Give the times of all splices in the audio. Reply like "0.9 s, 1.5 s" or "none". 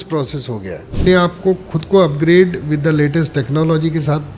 1.0 s